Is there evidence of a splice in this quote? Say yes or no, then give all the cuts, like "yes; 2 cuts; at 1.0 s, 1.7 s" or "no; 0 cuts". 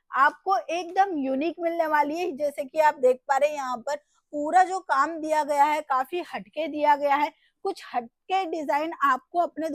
no; 0 cuts